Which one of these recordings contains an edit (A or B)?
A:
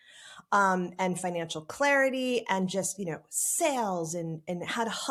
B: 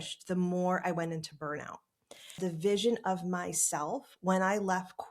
B